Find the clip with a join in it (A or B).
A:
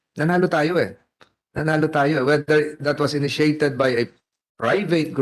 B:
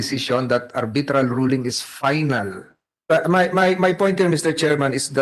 B